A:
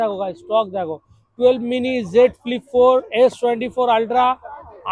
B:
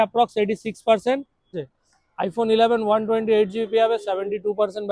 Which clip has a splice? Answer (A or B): B